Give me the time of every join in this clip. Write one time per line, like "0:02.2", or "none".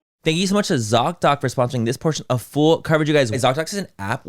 0:03.4

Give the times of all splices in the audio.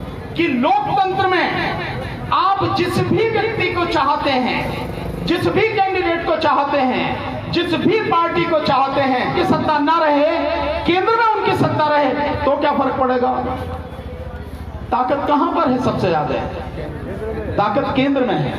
0:09.4

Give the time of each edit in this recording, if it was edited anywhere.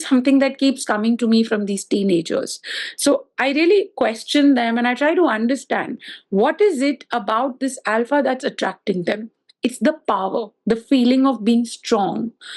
none

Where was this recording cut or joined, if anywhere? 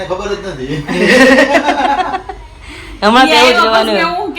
none

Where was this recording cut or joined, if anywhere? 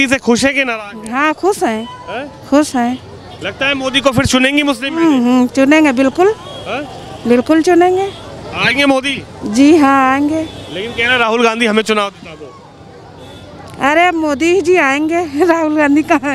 none

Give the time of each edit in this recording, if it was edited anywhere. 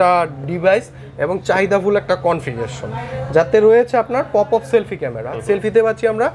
none

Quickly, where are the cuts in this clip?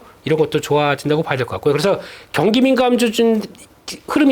none

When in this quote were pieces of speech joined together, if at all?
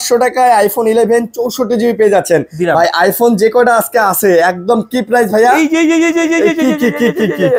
none

